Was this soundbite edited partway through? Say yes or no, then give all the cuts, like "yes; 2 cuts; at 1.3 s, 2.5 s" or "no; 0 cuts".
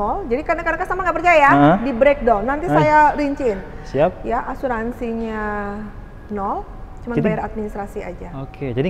no; 0 cuts